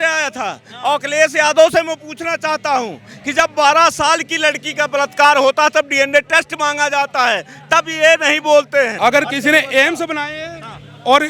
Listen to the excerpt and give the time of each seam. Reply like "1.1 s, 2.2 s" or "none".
8.9 s